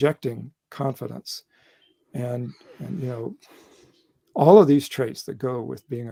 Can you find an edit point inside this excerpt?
no; 0 cuts

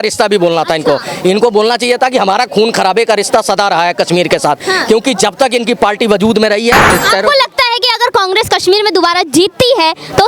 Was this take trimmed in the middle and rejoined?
yes; 1 cut; at 6.9 s

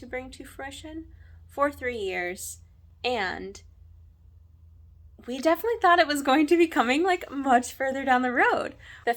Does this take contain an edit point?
no; 0 cuts

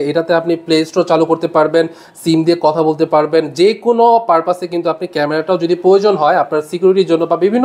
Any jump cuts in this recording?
no; 0 cuts

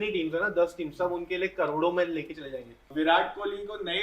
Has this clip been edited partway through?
yes; 1 cut; at 2.9 s

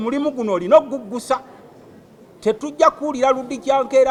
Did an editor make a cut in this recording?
no; 0 cuts

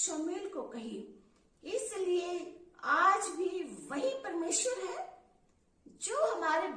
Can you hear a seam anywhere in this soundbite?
no; 0 cuts

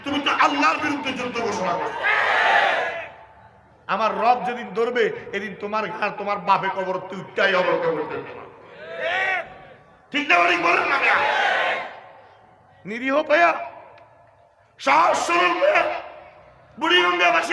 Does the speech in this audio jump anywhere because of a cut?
no; 0 cuts

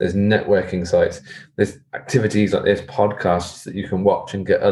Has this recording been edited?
no; 0 cuts

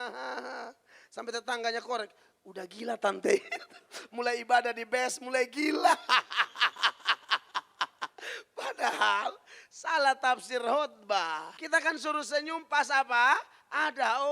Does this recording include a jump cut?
yes; 1 cut; at 11.5 s

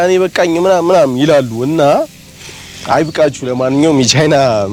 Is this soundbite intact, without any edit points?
yes; 0 cuts

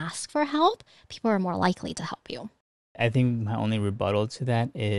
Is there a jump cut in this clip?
no; 0 cuts

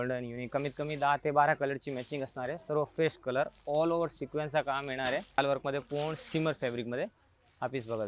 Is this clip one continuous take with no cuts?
no; 1 cut; at 5.4 s

